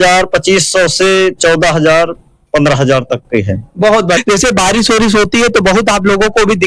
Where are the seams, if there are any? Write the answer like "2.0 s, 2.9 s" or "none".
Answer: 4.2 s